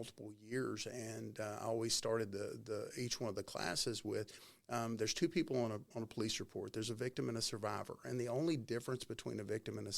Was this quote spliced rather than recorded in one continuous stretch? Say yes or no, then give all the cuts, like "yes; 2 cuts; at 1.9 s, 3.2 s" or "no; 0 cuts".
no; 0 cuts